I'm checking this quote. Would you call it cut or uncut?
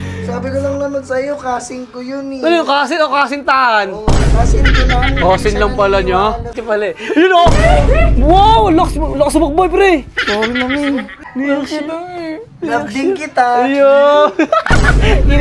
cut